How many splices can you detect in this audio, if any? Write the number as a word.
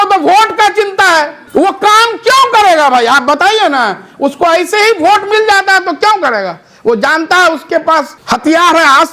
two